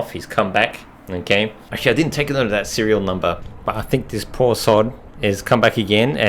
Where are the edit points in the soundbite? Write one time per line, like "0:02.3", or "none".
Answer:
0:01.7